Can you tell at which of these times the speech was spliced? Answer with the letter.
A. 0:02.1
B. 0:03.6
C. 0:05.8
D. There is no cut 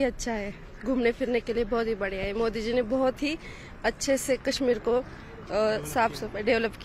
D